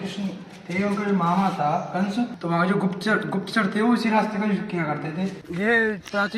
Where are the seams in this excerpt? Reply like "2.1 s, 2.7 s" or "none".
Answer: 2.4 s, 5.4 s